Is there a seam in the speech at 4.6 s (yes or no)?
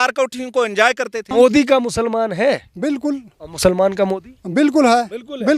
no